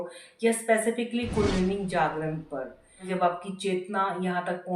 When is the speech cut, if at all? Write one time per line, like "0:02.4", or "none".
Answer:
0:03.1